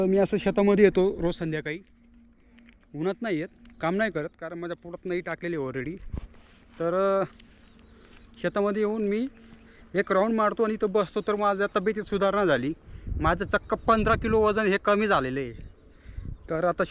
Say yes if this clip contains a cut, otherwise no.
no